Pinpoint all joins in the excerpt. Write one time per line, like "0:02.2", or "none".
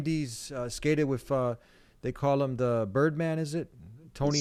none